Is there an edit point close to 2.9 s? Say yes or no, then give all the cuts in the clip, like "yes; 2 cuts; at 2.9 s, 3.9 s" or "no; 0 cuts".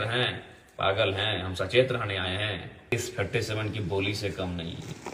yes; 1 cut; at 2.9 s